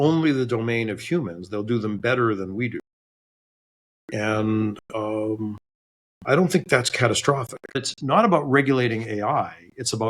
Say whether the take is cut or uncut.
cut